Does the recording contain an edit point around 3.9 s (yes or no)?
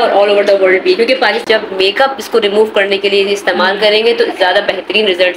no